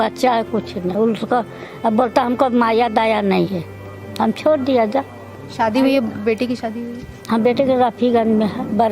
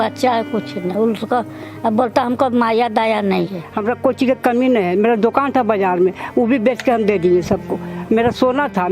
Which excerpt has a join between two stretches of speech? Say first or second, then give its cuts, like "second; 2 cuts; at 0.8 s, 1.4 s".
second; 1 cut; at 3.6 s